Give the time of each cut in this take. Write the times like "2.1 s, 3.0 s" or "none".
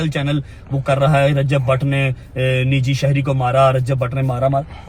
none